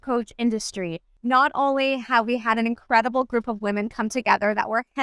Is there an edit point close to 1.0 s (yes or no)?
yes